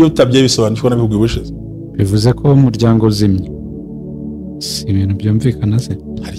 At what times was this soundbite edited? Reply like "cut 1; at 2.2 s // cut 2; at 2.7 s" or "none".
none